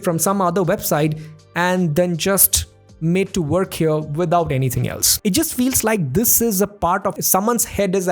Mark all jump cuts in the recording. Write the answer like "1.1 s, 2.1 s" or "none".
5.0 s, 7.2 s